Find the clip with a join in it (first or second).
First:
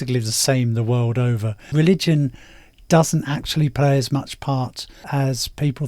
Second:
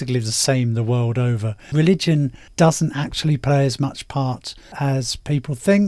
second